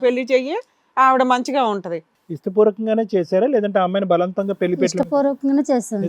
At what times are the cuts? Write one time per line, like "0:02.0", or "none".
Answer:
0:02.0